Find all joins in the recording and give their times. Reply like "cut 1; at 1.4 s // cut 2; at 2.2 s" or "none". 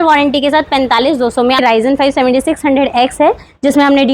cut 1; at 1.6 s